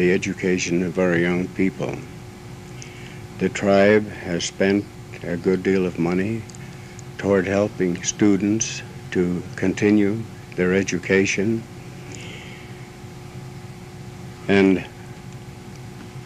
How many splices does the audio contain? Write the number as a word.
zero